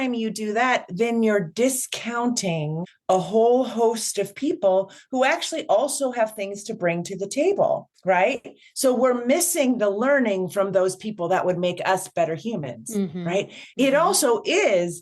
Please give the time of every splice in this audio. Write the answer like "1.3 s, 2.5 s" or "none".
2.9 s